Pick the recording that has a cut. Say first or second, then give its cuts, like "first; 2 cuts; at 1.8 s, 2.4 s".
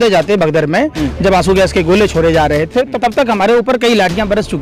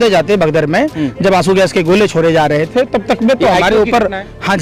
first; 1 cut; at 2.9 s